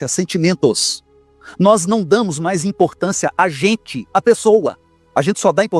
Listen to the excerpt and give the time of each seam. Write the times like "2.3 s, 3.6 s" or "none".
none